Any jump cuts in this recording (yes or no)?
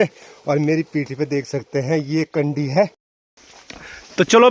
yes